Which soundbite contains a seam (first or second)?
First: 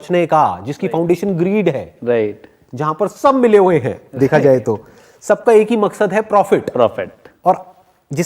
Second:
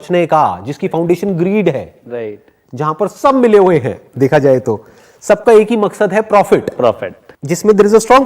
second